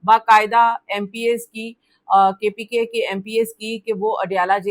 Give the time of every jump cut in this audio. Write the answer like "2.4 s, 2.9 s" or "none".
none